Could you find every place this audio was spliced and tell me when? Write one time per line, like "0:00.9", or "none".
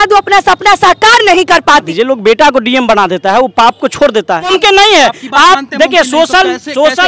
0:01.9
0:04.5